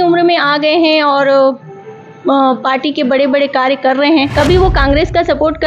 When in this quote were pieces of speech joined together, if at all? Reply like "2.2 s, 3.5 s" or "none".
4.3 s